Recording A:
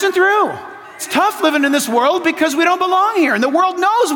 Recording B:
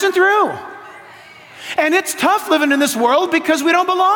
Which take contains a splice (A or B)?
A